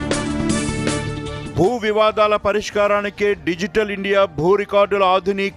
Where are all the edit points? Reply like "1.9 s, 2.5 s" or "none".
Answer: 1.3 s